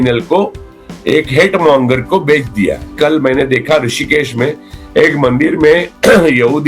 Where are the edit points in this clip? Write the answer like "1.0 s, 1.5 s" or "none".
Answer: 2.9 s